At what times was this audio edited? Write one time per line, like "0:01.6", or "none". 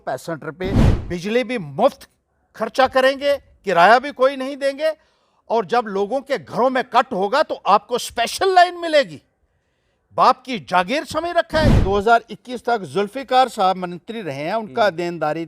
0:00.9
0:11.8

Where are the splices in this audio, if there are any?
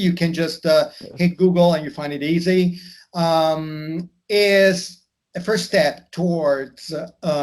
none

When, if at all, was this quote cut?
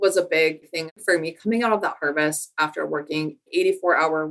0:01.0
0:03.5

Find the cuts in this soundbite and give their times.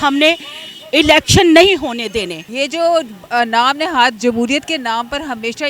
0:02.4

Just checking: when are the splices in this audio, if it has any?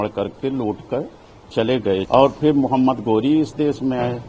0:02.1

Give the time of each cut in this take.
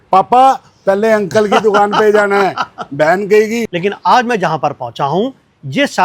0:03.7

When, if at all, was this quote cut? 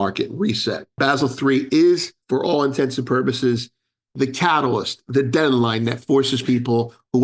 0:00.9
0:02.1

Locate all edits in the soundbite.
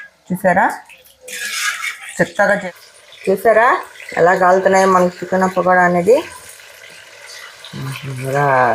0:02.6

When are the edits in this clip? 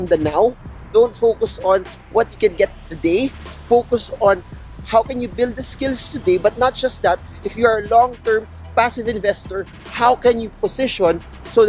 none

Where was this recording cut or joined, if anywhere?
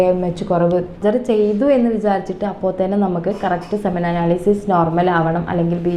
0:01.0

